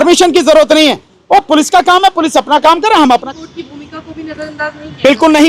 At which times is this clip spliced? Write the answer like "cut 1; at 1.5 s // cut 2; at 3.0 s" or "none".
cut 1; at 3.2 s

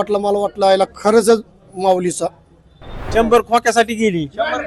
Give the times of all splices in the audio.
cut 1; at 2.9 s

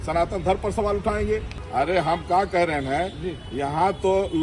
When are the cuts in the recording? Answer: cut 1; at 1.6 s

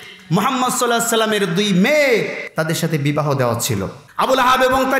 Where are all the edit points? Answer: cut 1; at 2.4 s // cut 2; at 4.0 s

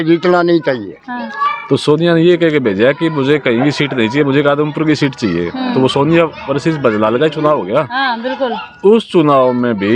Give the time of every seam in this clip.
cut 1; at 1.0 s

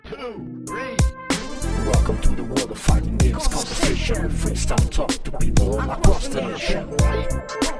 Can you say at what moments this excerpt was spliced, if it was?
cut 1; at 1.7 s

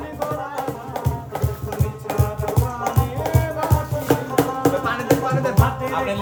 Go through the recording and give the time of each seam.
none

